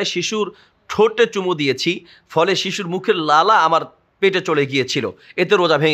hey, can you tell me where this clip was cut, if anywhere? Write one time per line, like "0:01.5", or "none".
none

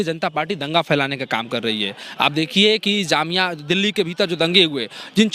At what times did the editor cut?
none

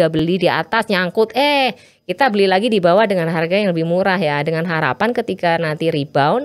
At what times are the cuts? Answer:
none

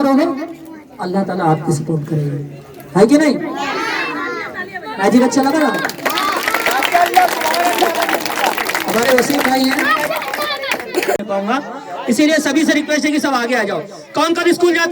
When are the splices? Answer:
0:11.2

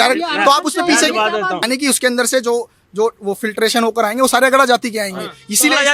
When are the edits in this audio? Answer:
0:01.6

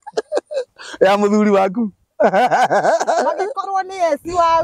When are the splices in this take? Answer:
none

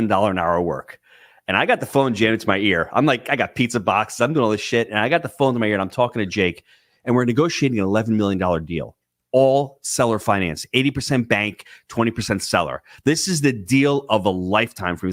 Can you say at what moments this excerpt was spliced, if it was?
none

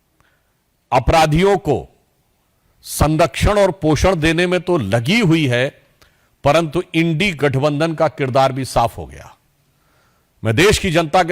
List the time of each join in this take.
none

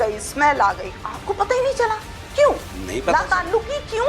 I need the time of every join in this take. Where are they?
0:01.0

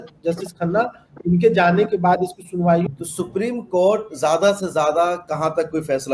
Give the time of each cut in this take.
0:02.9

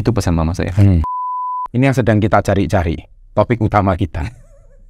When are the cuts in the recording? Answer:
0:01.2

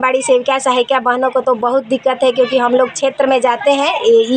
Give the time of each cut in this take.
none

